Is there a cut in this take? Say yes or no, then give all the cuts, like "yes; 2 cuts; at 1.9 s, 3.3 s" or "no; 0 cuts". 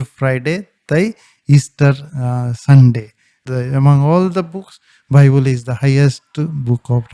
yes; 1 cut; at 3.4 s